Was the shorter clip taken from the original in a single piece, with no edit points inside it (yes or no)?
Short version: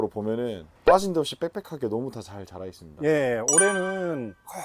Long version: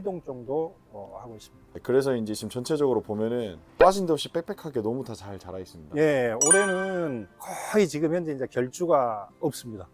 yes